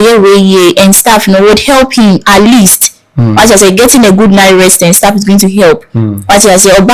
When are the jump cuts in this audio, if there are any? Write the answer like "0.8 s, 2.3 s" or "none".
none